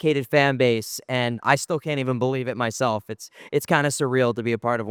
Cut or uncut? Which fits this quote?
uncut